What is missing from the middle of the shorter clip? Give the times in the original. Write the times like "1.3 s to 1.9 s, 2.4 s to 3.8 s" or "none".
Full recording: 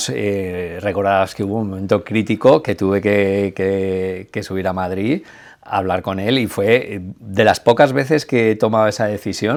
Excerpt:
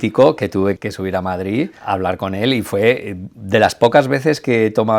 3.0 s to 4.3 s, 5.3 s to 5.6 s